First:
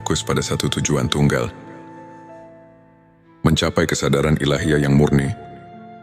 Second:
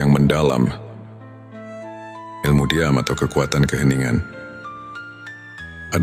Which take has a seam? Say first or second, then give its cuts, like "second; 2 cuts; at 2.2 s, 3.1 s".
first; 2 cuts; at 1.9 s, 3.4 s